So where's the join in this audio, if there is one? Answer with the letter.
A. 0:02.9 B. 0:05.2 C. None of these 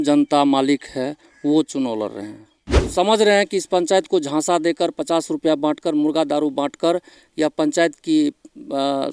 A